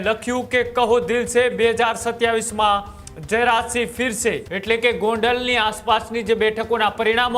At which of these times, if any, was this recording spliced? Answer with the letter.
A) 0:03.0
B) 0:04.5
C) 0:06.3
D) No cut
B